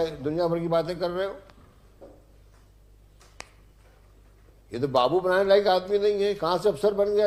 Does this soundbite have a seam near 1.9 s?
no; 0 cuts

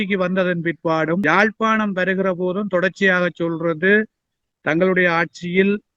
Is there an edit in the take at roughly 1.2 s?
yes; 1 cut; at 1.2 s

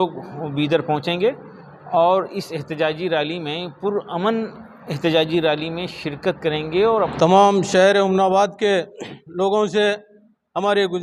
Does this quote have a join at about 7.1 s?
yes; 1 cut; at 7.1 s

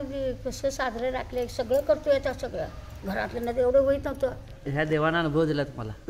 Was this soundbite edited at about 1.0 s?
no; 1 cut; at 4.6 s

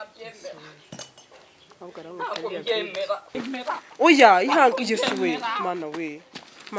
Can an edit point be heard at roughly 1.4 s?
no; 1 cut; at 3.4 s

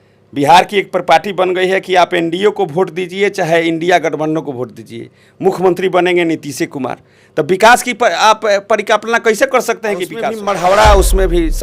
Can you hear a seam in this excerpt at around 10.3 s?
yes; 1 cut; at 10.3 s

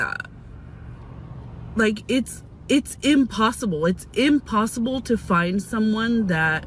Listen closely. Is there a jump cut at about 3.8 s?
no; 0 cuts

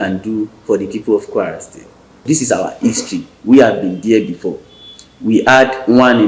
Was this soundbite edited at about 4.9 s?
no; 1 cut; at 2.2 s

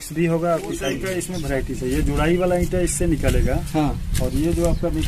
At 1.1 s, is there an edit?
yes; 1 cut; at 1.1 s

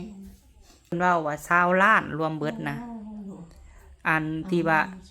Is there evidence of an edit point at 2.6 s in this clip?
no; 1 cut; at 0.9 s

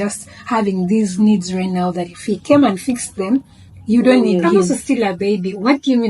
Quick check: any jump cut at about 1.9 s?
no; 1 cut; at 4.4 s

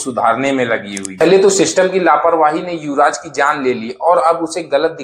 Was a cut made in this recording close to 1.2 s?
yes; 1 cut; at 1.2 s

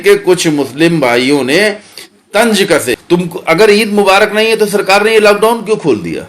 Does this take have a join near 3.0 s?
yes; 1 cut; at 3.0 s

